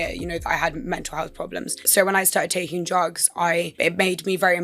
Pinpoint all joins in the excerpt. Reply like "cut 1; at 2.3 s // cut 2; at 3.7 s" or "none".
cut 1; at 1.8 s // cut 2; at 3.7 s